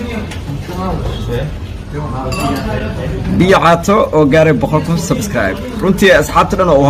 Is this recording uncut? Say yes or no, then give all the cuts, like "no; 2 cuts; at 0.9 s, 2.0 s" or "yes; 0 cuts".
yes; 0 cuts